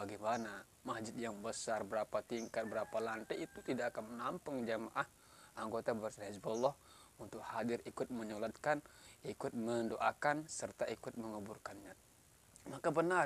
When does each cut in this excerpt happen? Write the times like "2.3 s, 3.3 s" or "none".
none